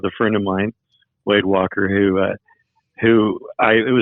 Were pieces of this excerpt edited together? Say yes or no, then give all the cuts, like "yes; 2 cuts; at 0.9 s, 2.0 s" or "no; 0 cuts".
no; 0 cuts